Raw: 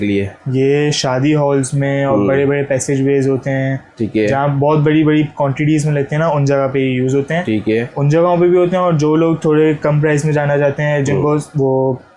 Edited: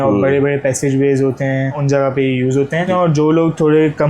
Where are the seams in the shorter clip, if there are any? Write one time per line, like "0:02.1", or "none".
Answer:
0:01.8
0:02.9